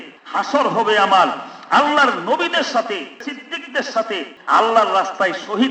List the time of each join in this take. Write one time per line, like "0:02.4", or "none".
0:03.2
0:04.3